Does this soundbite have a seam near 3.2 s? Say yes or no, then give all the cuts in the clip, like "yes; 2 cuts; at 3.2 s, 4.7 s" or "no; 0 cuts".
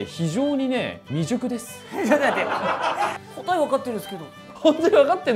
yes; 2 cuts; at 3.2 s, 4.4 s